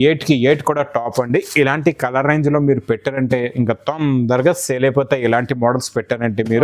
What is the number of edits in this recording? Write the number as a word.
zero